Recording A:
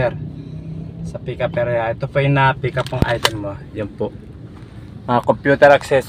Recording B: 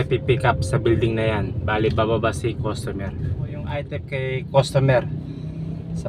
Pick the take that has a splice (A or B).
B